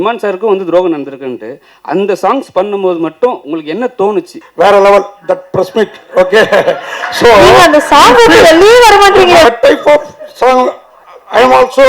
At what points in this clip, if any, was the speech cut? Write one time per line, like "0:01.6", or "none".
0:04.4
0:09.4